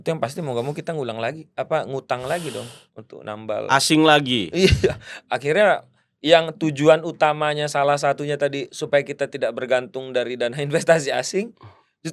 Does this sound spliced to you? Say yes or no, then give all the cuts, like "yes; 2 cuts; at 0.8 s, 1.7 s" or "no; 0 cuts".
no; 0 cuts